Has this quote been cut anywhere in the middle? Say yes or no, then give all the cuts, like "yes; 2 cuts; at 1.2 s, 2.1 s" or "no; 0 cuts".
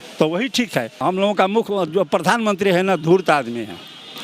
yes; 1 cut; at 1.0 s